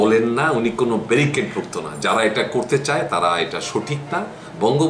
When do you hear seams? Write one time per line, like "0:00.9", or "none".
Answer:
none

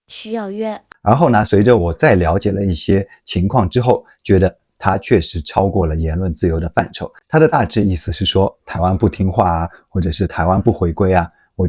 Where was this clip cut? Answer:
0:00.9
0:07.2

